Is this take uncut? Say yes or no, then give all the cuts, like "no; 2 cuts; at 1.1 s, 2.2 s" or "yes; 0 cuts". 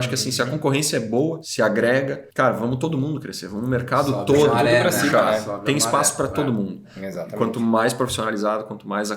no; 3 cuts; at 1.4 s, 2.2 s, 7.0 s